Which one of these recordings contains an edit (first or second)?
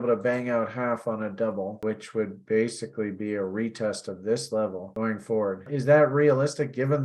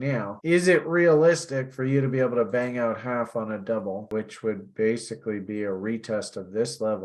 first